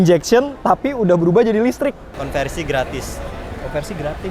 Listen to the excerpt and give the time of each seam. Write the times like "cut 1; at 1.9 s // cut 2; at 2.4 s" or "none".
cut 1; at 2.1 s

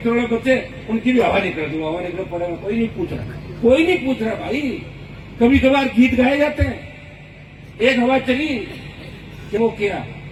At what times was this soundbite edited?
none

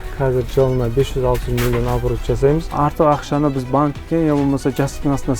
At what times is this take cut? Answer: cut 1; at 2.7 s

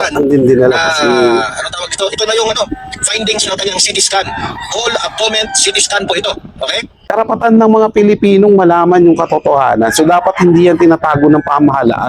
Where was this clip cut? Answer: cut 1; at 7.0 s

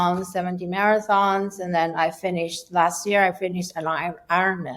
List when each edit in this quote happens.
none

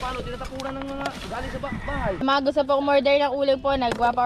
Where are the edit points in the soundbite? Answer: cut 1; at 2.2 s

